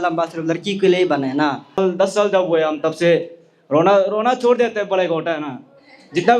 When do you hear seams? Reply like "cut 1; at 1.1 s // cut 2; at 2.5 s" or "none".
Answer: cut 1; at 1.8 s